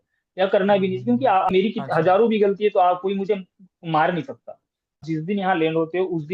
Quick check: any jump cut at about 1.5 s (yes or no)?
yes